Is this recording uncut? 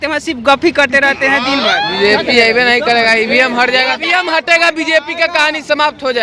no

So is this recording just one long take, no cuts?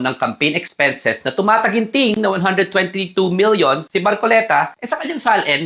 no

